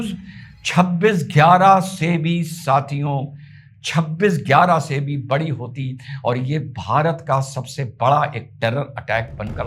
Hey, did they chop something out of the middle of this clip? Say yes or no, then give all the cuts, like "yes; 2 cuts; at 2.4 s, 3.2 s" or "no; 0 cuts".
no; 0 cuts